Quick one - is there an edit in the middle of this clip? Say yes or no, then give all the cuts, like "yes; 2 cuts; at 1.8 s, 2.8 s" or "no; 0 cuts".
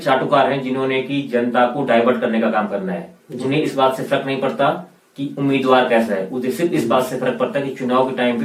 no; 0 cuts